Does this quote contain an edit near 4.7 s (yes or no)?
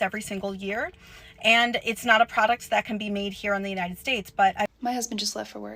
yes